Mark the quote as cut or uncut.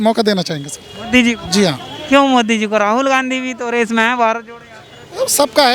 uncut